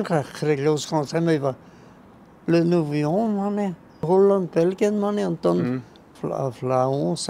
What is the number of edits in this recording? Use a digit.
0